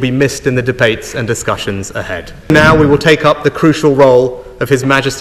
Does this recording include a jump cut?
yes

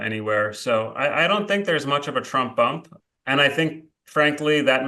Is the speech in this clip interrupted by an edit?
yes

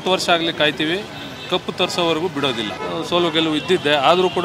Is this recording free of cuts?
yes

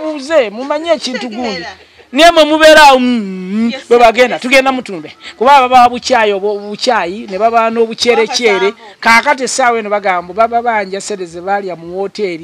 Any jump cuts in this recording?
no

